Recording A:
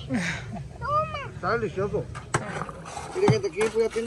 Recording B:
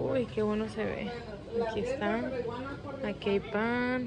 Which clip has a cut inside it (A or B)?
A